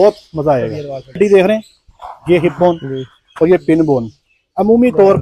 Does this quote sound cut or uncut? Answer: cut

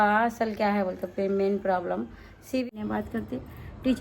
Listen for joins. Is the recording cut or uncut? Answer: cut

